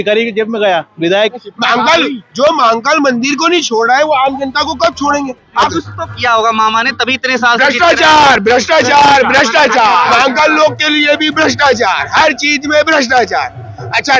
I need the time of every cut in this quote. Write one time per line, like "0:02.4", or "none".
0:01.1
0:05.7
0:10.1